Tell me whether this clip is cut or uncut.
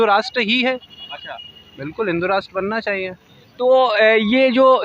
uncut